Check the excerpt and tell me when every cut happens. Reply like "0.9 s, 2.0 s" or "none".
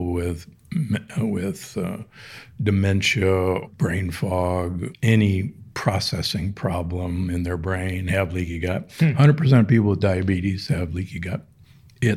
3.7 s, 4.9 s